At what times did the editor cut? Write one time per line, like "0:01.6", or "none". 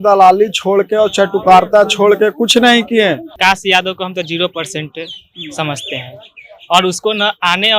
0:03.3

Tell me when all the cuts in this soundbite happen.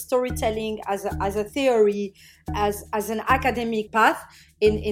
0:02.5
0:03.9

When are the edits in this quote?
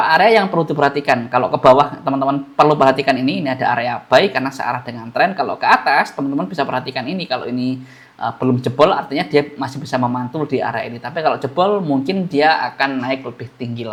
none

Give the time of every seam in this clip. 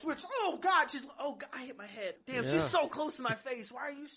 0:02.2

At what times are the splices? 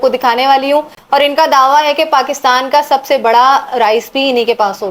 none

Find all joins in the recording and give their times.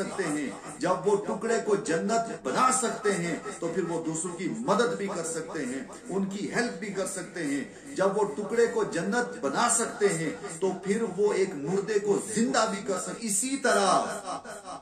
0:13.2

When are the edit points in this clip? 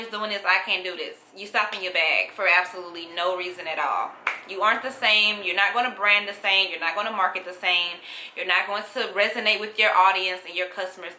none

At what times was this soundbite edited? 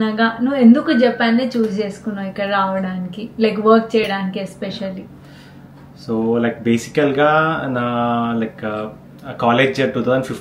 none

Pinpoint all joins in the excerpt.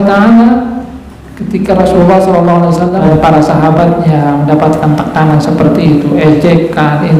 0:03.0

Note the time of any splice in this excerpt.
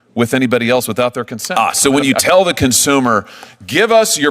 0:01.4

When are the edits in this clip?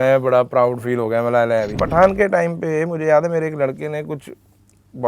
0:01.8

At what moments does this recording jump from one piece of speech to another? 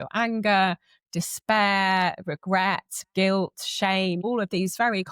0:01.0
0:04.2

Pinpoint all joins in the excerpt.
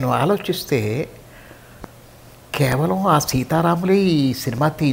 none

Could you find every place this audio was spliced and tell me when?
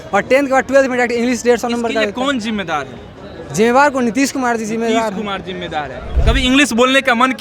0:06.1

